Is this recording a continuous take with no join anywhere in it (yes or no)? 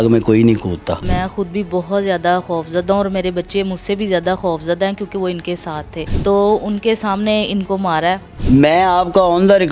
no